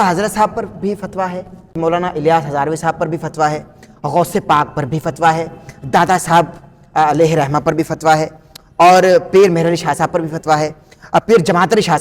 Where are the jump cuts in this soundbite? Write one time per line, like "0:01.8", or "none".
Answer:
0:01.8